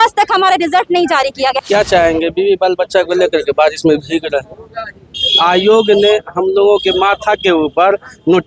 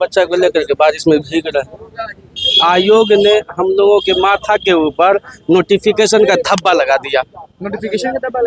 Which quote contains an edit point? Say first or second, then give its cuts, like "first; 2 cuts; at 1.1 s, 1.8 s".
first; 1 cut; at 1.6 s